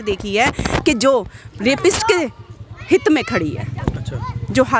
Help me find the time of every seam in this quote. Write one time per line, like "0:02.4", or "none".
none